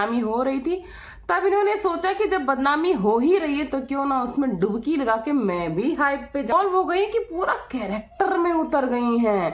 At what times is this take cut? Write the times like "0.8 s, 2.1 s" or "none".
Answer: 6.5 s